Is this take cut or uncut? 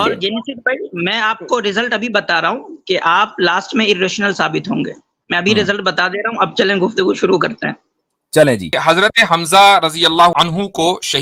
cut